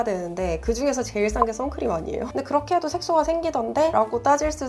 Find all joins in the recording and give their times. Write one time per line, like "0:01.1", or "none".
0:02.3